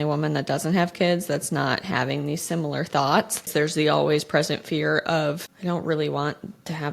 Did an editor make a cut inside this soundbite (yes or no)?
yes